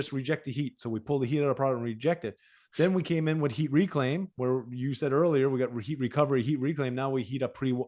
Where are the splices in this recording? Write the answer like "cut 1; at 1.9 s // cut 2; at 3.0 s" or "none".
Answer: none